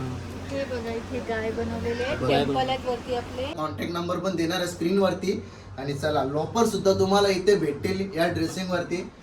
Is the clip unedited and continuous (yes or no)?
no